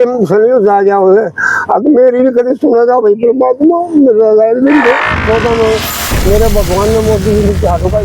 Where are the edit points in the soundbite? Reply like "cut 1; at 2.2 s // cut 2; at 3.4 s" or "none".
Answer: cut 1; at 5.2 s